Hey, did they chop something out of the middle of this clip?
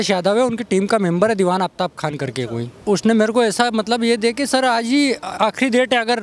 yes; 1 cut; at 2.8 s

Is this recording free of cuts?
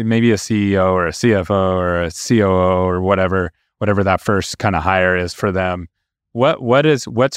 yes; 0 cuts

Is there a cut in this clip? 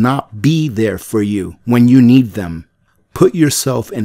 yes; 2 cuts; at 1.5 s, 3.0 s

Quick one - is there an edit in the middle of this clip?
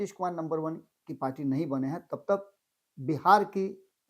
no; 0 cuts

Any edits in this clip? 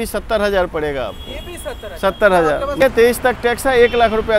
yes; 1 cut; at 2.8 s

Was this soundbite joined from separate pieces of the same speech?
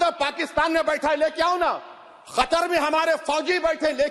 no; 0 cuts

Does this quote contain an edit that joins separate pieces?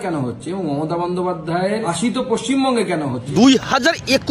yes; 2 cuts; at 1.9 s, 3.2 s

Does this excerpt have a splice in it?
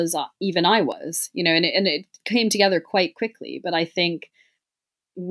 no; 0 cuts

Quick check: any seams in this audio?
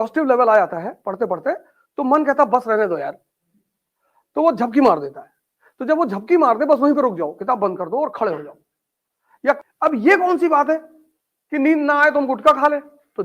yes; 1 cut; at 9.6 s

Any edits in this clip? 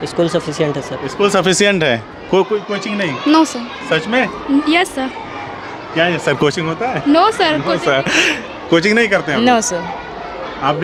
no; 0 cuts

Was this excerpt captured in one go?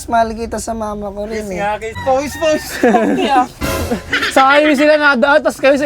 no; 1 cut; at 1.9 s

